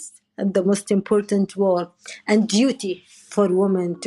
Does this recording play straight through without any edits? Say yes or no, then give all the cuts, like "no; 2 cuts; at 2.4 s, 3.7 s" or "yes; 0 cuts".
yes; 0 cuts